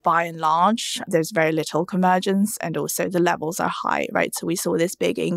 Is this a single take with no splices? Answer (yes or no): no